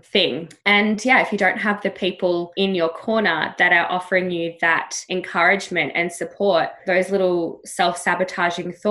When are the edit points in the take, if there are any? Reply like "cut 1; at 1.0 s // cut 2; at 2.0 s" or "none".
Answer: cut 1; at 2.5 s // cut 2; at 4.9 s